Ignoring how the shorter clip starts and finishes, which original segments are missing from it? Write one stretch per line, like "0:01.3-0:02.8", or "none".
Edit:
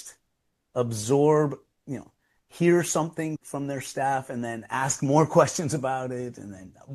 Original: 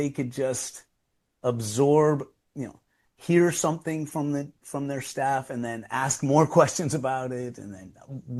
0:04.1-0:04.6